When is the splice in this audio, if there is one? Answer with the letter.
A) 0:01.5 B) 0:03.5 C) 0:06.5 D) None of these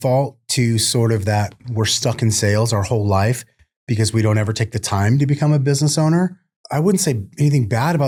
D